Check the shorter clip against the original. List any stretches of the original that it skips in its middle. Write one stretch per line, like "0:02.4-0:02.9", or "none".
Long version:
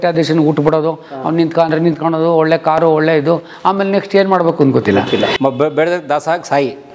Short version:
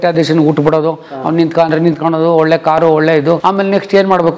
0:03.4-0:03.6